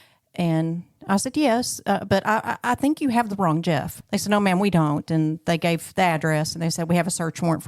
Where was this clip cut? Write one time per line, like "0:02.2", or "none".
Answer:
0:03.9